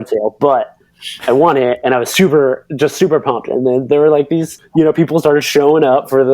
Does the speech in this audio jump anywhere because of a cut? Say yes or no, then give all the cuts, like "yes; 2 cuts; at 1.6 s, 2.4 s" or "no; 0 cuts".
yes; 1 cut; at 4.6 s